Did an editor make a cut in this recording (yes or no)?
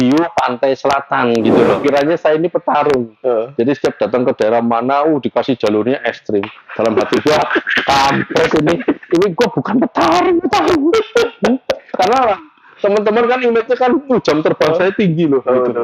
yes